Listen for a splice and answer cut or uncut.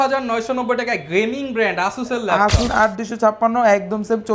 cut